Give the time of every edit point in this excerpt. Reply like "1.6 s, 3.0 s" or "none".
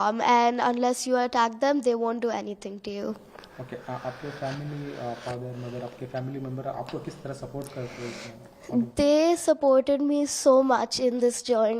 none